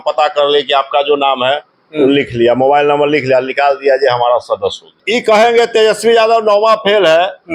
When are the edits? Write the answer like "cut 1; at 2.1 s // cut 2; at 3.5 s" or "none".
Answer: cut 1; at 4.9 s